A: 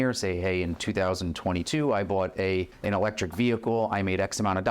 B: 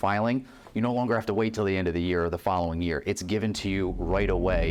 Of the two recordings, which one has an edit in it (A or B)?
A